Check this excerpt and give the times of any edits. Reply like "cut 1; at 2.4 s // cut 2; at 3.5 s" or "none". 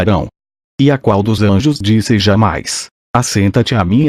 none